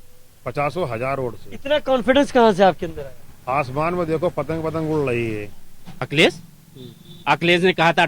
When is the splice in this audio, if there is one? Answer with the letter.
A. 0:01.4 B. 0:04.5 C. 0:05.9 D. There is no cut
C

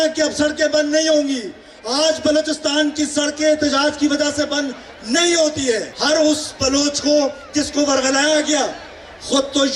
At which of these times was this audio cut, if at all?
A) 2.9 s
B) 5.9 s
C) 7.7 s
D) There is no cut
B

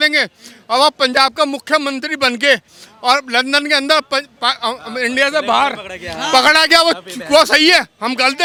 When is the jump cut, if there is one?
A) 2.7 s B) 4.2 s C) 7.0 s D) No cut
D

